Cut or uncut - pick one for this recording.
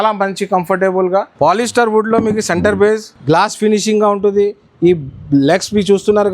cut